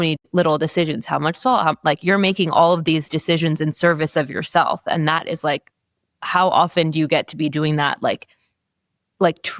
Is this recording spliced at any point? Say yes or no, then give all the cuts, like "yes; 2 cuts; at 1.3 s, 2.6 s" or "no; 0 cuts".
yes; 1 cut; at 1.8 s